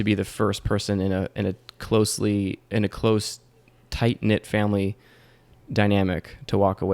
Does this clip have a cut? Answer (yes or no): no